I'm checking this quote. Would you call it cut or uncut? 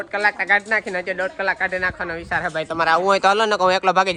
uncut